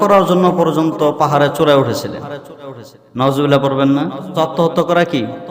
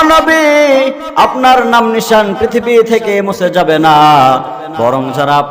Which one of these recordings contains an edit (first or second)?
first